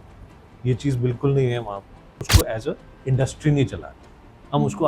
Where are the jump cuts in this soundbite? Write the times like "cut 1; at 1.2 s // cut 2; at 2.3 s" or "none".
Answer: cut 1; at 2.3 s